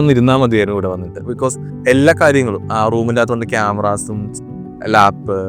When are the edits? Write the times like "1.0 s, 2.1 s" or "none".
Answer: none